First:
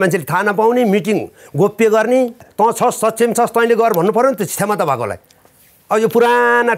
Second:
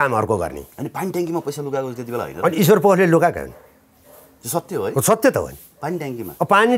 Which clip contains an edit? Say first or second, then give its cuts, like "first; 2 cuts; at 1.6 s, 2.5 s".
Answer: first; 1 cut; at 2.5 s